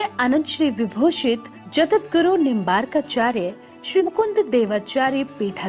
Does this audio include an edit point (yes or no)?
yes